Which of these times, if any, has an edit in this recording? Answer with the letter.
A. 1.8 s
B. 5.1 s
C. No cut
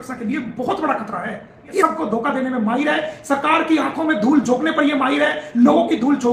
A